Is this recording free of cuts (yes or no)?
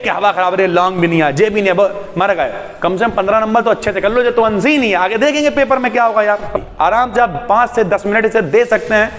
no